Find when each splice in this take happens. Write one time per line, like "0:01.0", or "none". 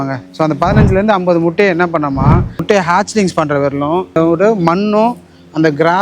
0:02.6
0:04.1